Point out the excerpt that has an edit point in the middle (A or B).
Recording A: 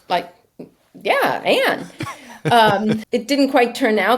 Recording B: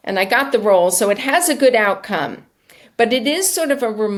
A